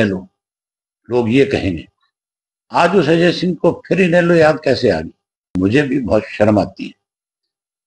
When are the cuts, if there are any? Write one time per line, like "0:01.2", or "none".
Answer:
0:05.6

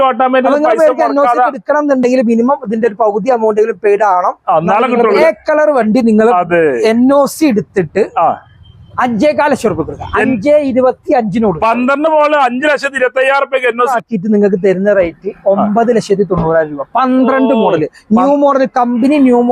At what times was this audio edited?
0:05.2
0:13.9

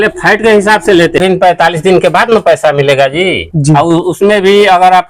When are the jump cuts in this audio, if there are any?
0:01.2

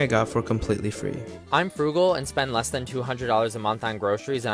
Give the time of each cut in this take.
0:01.4

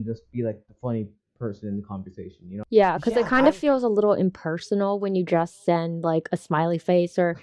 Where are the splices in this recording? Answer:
0:02.5

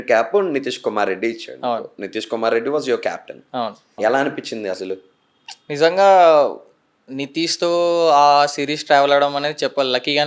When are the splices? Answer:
0:03.9

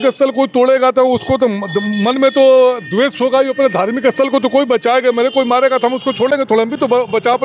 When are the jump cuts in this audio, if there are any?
none

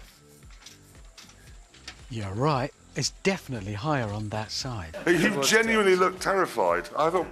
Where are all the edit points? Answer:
0:04.9

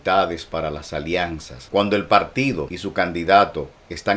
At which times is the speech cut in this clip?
0:01.5
0:02.7

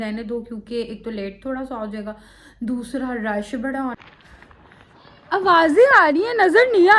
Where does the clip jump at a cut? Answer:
0:03.9

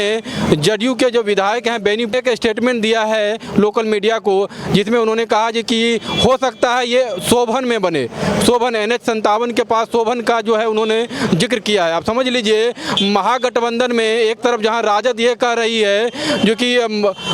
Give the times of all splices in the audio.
0:02.1

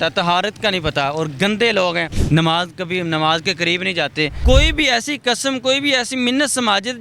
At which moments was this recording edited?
0:02.1
0:04.4

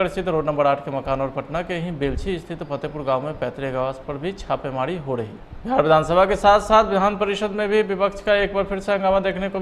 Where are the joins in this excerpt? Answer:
0:05.6

